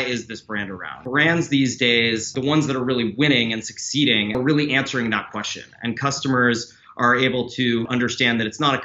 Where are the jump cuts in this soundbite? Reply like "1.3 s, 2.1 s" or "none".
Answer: 0.9 s, 2.3 s, 4.4 s, 7.9 s